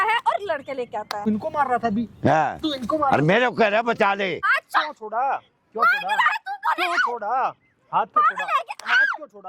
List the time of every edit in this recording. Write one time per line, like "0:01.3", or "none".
0:01.3
0:04.4